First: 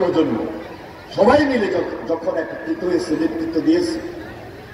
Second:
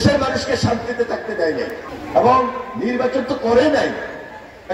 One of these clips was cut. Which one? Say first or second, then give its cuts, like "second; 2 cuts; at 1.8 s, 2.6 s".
second; 1 cut; at 1.9 s